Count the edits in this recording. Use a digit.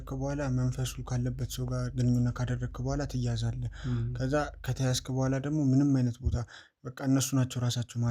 0